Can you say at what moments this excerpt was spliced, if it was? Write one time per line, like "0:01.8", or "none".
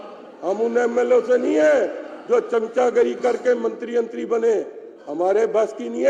none